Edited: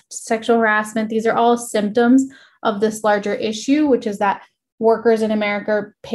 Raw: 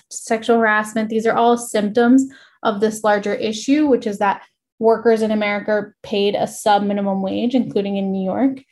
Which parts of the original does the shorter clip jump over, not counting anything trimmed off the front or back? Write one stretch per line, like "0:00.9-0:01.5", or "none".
none